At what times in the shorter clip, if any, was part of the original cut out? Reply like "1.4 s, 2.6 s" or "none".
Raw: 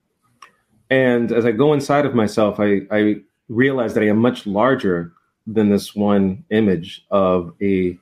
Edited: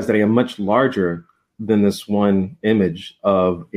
none